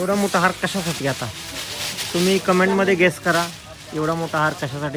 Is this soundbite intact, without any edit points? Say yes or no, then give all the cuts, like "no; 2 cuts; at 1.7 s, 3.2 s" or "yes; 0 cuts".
yes; 0 cuts